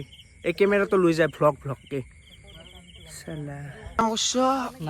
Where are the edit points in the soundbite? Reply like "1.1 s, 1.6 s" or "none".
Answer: 3.7 s